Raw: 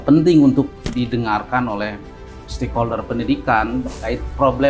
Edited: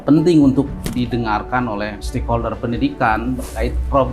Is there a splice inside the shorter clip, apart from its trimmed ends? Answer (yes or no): yes